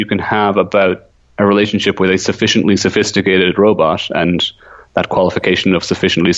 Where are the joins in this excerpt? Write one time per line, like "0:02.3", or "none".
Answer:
none

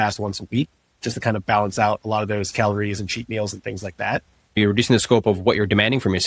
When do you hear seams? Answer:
0:04.6

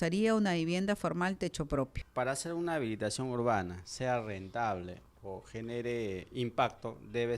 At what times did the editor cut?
0:02.0

